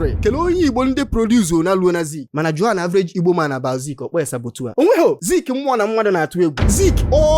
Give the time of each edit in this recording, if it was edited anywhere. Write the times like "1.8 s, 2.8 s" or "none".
2.2 s, 4.6 s